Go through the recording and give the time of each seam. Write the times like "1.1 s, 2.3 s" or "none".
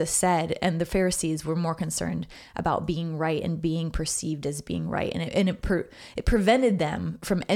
none